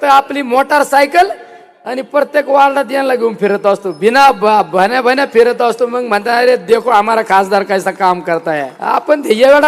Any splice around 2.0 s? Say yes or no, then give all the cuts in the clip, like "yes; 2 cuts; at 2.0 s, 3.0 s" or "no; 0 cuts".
no; 1 cut; at 8.7 s